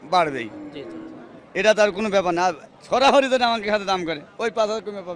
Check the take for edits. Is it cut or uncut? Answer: uncut